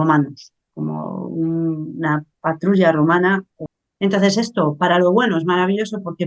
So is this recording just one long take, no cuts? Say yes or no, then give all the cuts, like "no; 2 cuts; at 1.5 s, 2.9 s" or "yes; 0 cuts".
no; 1 cut; at 3.5 s